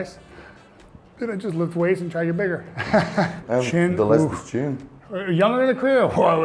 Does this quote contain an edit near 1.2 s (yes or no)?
no